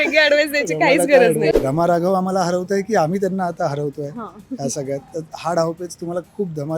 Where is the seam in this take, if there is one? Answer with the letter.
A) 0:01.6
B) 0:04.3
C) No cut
A